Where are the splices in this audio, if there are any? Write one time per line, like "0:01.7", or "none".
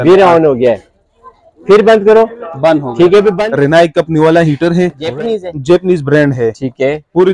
0:03.4
0:05.0